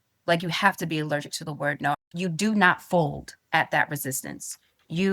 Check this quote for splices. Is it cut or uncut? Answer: cut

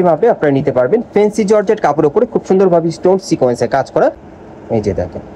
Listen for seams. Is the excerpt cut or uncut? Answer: cut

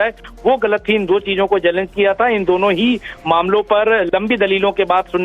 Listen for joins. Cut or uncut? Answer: uncut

